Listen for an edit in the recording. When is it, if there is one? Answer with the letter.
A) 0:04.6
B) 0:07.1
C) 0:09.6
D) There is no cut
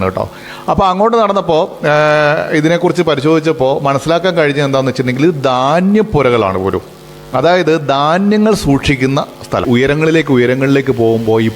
C